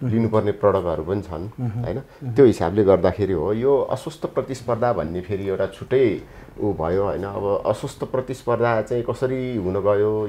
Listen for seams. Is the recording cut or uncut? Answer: uncut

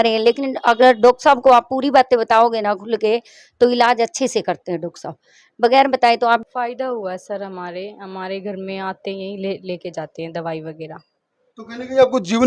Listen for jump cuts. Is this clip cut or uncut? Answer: cut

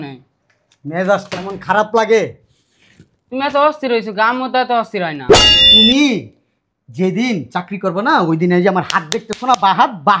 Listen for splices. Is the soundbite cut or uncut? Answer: cut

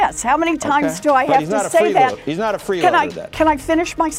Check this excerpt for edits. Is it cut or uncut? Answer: uncut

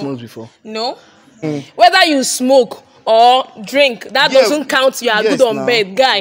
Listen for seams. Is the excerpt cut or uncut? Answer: cut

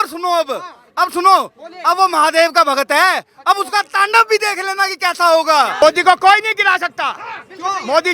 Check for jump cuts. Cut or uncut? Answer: cut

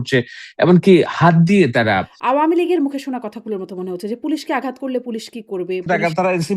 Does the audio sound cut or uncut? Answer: cut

